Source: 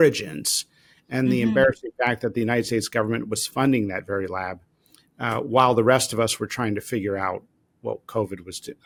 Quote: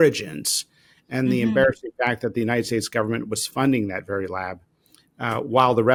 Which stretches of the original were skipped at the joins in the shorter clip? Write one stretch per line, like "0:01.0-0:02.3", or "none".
none